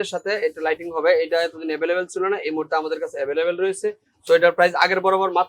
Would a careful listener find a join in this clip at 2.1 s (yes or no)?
no